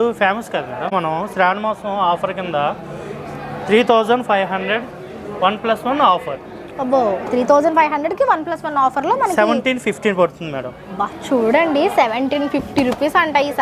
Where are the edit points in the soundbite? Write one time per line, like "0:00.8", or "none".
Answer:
0:00.9